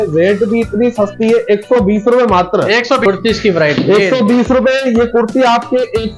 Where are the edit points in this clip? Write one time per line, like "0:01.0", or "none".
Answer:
0:03.1